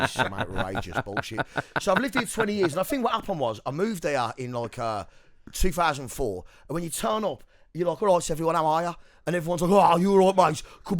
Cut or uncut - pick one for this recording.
uncut